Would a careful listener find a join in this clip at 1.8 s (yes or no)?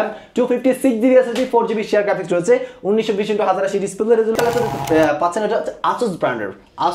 no